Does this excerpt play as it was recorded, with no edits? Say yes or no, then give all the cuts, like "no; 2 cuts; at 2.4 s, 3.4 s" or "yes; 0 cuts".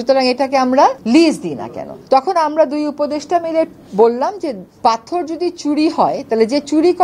yes; 0 cuts